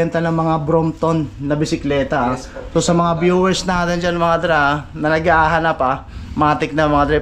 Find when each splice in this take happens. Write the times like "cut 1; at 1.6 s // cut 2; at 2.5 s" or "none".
none